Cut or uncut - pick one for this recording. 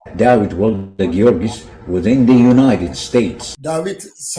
cut